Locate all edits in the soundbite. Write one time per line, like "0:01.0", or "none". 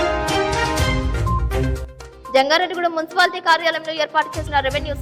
0:01.7